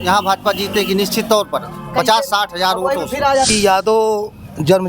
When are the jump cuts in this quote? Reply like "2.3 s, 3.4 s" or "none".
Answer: 3.5 s